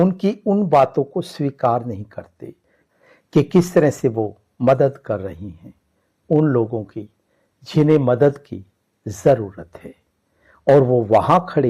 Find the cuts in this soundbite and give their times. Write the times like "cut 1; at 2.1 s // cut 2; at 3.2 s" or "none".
cut 1; at 2.9 s